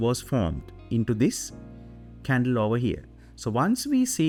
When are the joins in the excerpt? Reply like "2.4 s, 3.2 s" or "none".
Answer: none